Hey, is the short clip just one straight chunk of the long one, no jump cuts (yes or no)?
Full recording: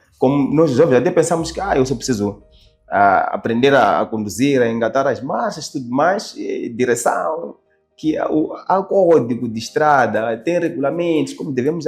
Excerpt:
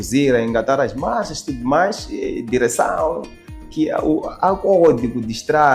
yes